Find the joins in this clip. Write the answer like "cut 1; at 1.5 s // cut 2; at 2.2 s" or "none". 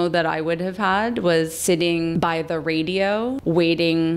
cut 1; at 2.1 s // cut 2; at 3.4 s